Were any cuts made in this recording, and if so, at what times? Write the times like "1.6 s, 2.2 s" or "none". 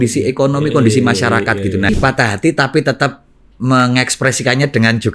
1.9 s